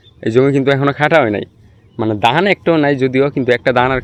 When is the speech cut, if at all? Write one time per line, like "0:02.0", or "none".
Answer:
none